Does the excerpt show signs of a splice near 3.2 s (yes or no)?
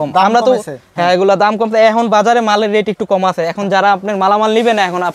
no